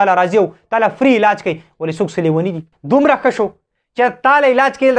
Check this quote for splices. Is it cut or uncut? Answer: cut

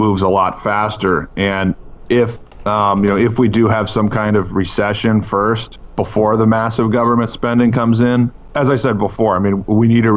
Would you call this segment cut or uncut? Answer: cut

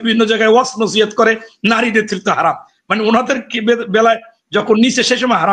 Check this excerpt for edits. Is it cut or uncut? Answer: uncut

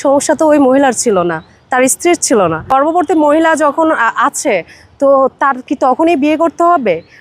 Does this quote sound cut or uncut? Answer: cut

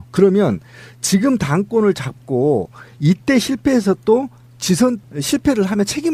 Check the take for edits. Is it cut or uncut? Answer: uncut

